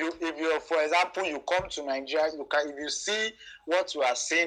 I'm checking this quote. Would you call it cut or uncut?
uncut